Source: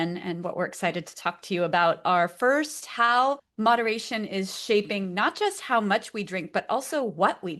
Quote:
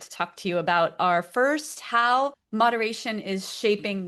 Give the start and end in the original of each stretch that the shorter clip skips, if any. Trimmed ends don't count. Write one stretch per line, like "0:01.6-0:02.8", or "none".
none